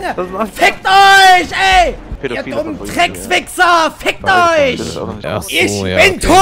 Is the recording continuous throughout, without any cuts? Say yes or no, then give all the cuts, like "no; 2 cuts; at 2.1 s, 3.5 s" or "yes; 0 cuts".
no; 2 cuts; at 2.1 s, 5.2 s